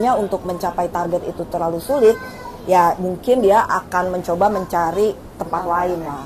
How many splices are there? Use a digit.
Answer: 0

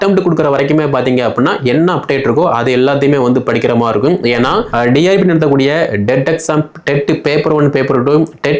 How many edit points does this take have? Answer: 1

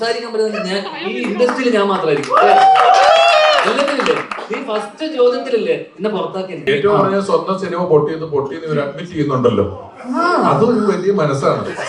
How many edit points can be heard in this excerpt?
1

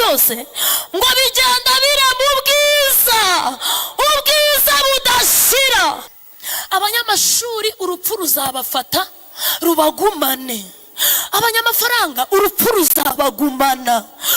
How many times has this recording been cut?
1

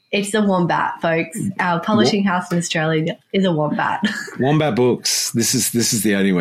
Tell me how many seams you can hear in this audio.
0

